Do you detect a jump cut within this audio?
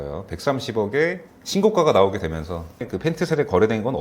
yes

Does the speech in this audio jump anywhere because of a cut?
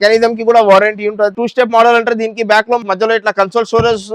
yes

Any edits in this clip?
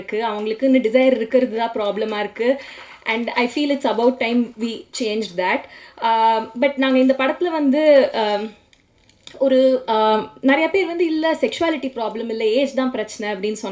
no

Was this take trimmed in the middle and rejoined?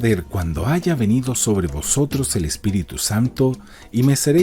no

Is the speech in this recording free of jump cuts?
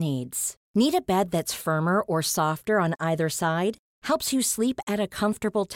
yes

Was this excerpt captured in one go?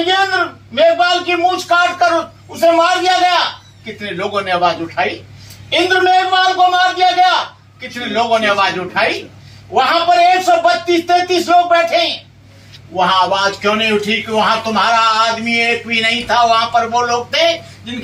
yes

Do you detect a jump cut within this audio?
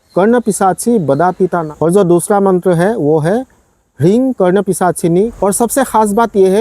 yes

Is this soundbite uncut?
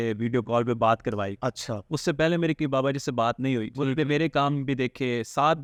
yes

